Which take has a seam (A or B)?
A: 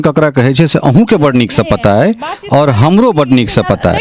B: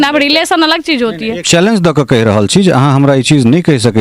B